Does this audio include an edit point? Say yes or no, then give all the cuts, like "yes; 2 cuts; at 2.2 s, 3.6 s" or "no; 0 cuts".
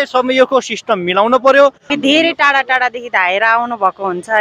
yes; 1 cut; at 1.9 s